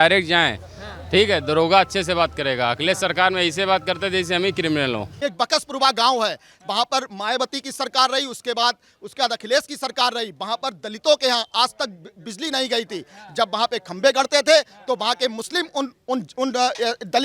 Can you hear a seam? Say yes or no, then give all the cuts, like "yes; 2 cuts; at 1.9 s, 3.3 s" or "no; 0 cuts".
yes; 1 cut; at 5.1 s